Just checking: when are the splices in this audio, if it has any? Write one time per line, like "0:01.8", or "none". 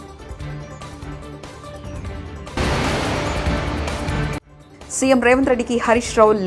0:02.1